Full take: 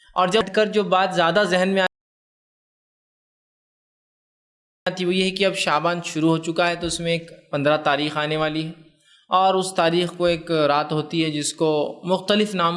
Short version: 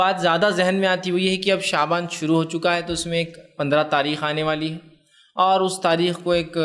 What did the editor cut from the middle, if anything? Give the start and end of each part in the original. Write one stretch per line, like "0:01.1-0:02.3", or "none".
0:01.9-0:04.9